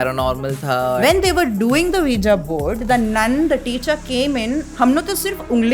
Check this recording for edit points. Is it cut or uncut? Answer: cut